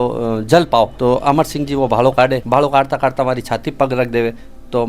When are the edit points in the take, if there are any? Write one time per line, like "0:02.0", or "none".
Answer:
0:00.9
0:02.4